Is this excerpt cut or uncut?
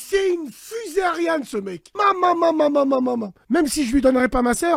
cut